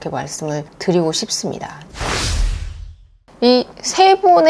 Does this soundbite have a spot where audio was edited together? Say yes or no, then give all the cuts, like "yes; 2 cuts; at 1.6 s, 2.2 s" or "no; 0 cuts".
yes; 2 cuts; at 2.0 s, 3.3 s